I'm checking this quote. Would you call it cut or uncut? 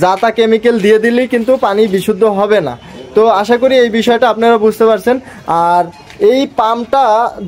uncut